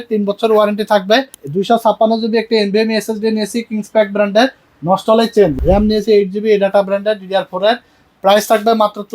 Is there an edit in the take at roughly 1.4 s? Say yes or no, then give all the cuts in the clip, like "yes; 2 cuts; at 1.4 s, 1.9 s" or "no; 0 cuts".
yes; 2 cuts; at 1.4 s, 5.6 s